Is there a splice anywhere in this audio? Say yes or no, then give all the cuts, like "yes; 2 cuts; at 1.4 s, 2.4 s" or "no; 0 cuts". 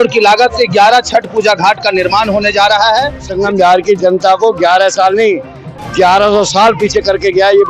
yes; 1 cut; at 3.3 s